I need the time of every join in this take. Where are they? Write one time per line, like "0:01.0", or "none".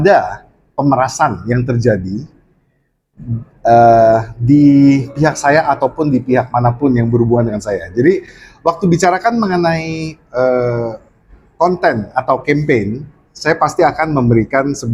none